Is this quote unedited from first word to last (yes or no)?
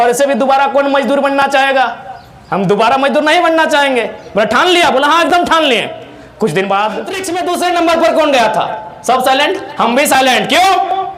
no